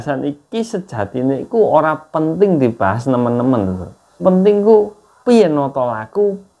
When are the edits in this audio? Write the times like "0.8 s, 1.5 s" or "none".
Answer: 4.2 s